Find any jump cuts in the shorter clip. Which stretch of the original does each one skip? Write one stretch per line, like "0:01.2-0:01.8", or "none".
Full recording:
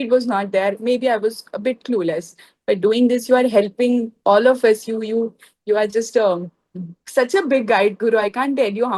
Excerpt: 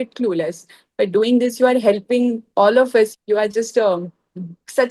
0:04.9-0:05.6